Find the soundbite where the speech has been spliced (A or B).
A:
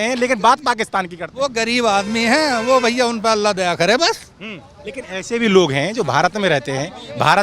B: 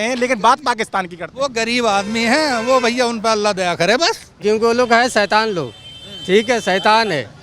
B